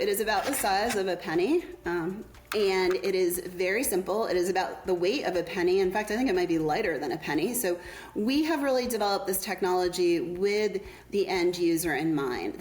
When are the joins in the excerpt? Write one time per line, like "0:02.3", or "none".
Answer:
0:02.3